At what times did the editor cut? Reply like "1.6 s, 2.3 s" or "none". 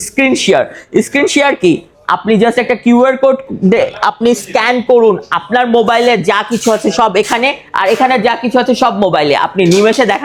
none